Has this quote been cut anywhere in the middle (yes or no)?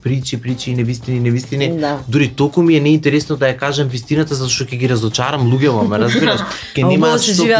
no